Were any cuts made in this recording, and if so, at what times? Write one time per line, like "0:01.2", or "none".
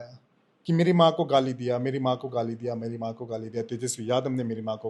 none